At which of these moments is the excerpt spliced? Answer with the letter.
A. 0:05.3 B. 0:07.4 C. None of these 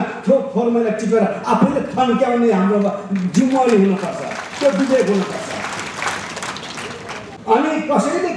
B